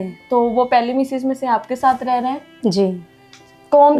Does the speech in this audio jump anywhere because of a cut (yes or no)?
no